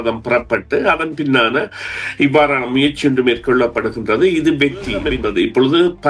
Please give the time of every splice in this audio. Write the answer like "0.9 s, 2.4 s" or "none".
5.1 s